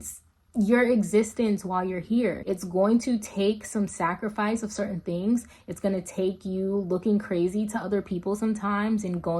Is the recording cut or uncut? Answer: cut